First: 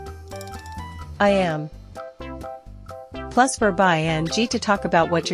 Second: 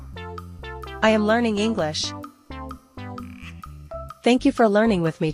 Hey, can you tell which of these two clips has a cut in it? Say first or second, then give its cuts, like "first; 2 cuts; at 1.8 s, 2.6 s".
second; 3 cuts; at 1.0 s, 2.7 s, 4.2 s